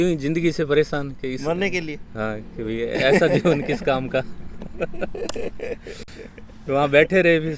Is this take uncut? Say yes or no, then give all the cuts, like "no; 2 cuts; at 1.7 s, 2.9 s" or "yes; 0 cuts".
yes; 0 cuts